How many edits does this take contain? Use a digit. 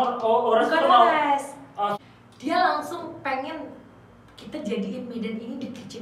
1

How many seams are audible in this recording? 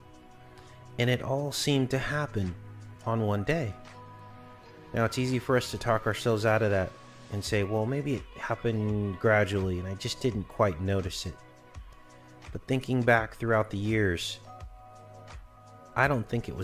0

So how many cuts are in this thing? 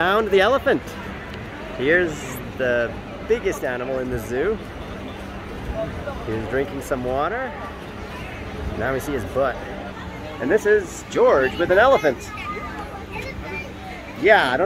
1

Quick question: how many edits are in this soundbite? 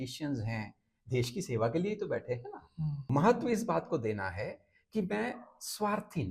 1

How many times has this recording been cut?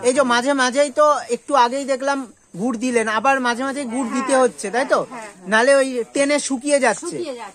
0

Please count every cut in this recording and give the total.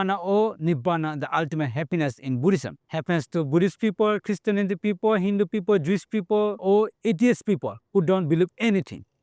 2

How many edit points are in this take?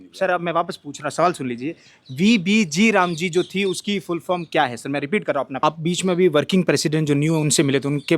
1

